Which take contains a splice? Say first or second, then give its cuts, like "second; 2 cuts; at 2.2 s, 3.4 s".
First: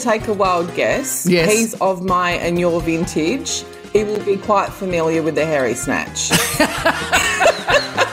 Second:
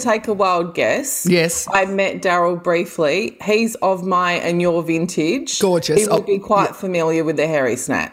first; 2 cuts; at 1.5 s, 6.2 s